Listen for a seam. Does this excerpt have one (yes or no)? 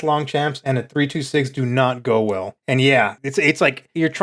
no